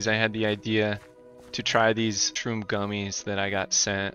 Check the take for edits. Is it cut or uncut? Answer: cut